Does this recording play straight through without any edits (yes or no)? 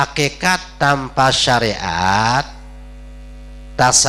yes